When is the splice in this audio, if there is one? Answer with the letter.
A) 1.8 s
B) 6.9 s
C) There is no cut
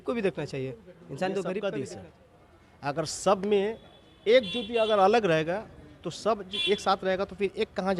A